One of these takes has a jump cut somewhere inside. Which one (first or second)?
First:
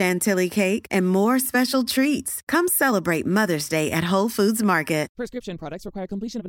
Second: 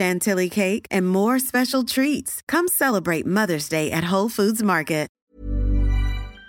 second